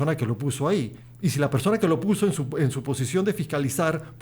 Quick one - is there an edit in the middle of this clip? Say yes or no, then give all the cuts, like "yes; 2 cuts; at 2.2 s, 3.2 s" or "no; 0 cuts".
yes; 1 cut; at 1.0 s